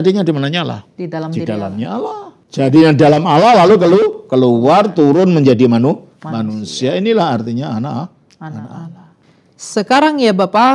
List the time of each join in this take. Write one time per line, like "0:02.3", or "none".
0:02.3
0:09.2

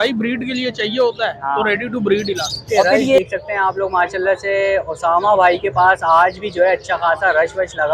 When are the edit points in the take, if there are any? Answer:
0:03.2

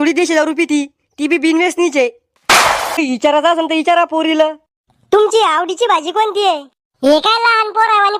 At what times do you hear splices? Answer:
0:03.0

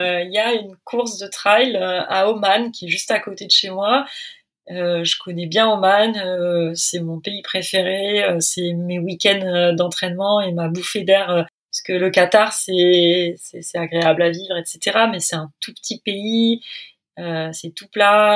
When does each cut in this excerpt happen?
none

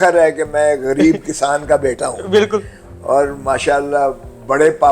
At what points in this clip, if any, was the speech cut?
none

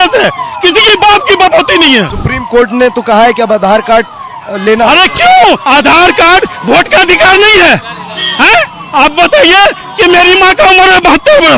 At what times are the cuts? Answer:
0:02.1
0:05.6

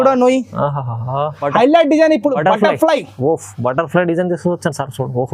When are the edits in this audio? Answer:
0:01.4

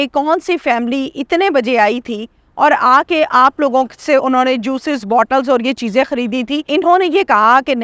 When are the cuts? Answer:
0:06.7

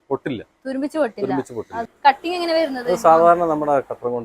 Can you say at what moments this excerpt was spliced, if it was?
0:01.8

